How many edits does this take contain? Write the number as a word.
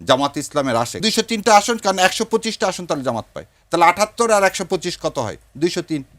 one